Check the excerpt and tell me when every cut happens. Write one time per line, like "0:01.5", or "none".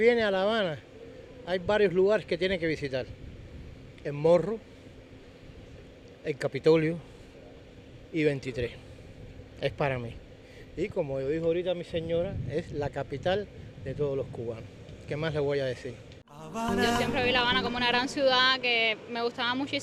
none